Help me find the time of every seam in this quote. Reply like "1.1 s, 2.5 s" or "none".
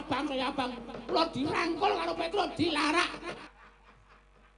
3.4 s